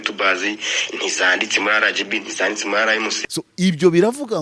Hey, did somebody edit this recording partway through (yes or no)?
yes